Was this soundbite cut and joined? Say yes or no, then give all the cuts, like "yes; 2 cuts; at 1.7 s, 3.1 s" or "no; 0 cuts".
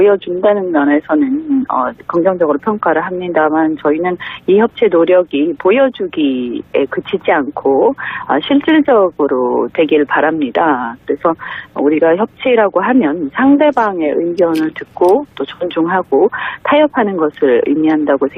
no; 0 cuts